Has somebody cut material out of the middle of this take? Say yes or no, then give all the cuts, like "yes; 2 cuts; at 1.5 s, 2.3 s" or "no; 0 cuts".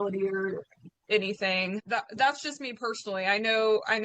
yes; 1 cut; at 1.8 s